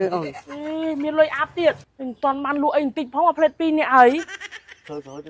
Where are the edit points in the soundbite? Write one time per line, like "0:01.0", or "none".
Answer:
0:01.9

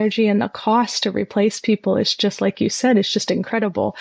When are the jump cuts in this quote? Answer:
none

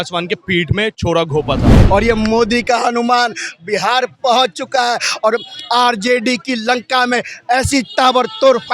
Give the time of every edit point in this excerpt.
0:01.8

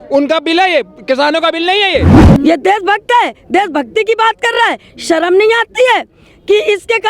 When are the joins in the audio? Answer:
0:02.2

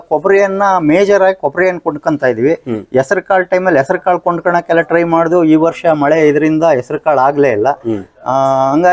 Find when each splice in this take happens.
none

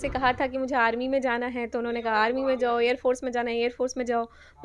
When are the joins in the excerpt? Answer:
none

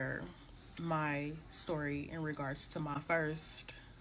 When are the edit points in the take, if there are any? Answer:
0:02.9

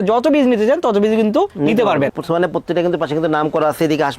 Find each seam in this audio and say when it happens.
0:02.1

